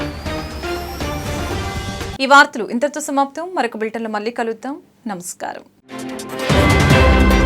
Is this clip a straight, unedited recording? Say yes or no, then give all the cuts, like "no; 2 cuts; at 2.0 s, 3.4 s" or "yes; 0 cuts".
yes; 0 cuts